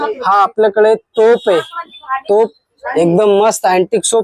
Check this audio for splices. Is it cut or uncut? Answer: uncut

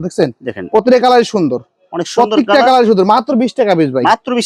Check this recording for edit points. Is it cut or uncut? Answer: uncut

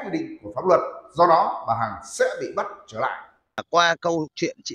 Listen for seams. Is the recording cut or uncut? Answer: cut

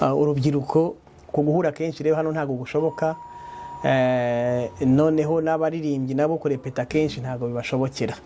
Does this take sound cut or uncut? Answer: cut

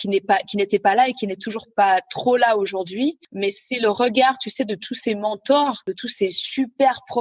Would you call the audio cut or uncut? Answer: cut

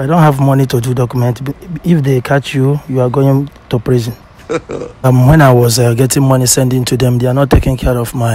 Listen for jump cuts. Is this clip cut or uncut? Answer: cut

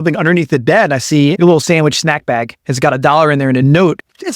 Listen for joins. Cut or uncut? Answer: cut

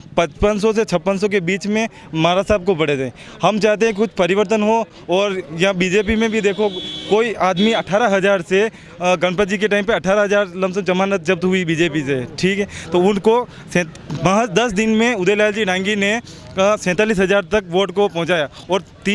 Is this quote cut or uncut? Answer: uncut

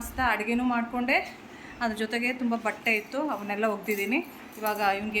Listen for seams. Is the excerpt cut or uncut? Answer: uncut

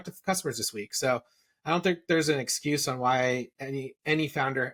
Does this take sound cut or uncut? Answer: uncut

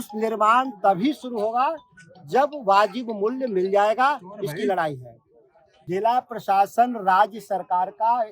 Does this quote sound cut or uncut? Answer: cut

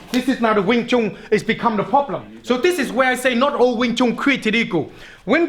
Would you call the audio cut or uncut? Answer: cut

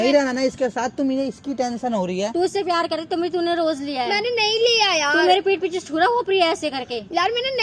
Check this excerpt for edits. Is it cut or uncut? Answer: uncut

